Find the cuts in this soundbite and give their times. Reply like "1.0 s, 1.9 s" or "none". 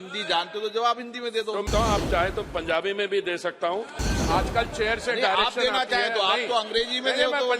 1.7 s, 3.9 s

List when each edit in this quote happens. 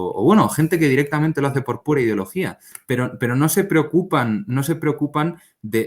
2.7 s

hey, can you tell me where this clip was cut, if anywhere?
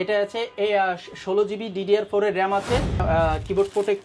3.0 s

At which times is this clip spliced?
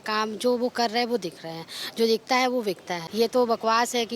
2.9 s

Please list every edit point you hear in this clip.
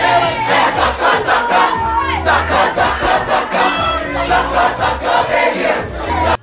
none

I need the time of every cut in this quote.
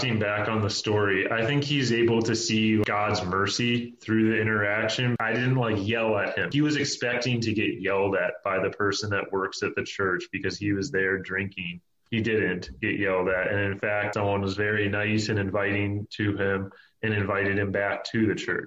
2.8 s, 5.2 s, 6.5 s, 14.1 s

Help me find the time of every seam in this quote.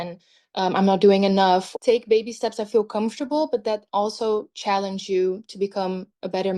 1.7 s

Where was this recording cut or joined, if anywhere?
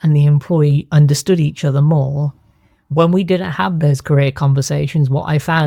none

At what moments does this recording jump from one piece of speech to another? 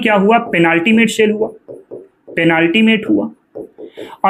none

